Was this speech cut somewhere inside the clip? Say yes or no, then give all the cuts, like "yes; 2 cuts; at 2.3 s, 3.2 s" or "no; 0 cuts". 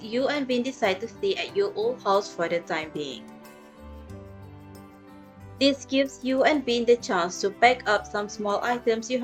no; 0 cuts